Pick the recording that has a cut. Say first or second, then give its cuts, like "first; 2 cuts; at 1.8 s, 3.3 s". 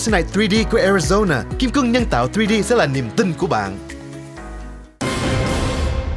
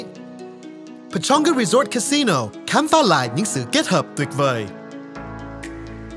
first; 1 cut; at 4.9 s